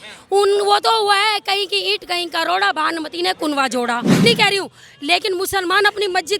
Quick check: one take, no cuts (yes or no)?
no